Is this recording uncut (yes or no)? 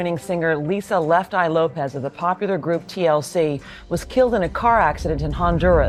yes